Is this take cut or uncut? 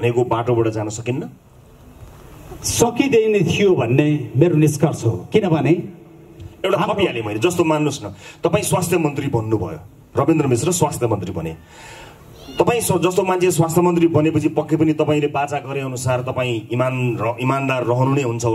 uncut